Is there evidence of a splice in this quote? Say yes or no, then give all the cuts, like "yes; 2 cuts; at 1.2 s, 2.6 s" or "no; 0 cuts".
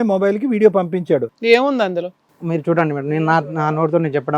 yes; 1 cut; at 1.3 s